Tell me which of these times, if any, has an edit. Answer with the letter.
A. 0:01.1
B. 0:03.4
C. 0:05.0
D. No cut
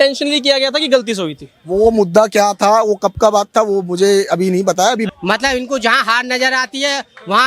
C